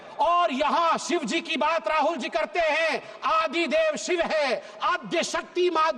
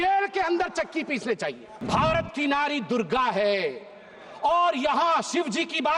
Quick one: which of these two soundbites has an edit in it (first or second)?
second